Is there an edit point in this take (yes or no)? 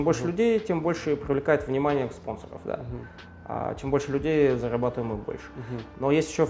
no